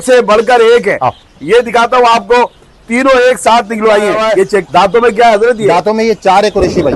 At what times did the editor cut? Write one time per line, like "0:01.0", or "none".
0:04.6